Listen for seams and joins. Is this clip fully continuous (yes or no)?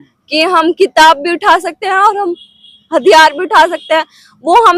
yes